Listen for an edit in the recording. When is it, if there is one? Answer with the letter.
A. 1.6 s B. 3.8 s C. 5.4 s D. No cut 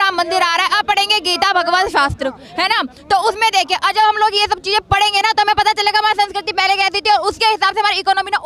D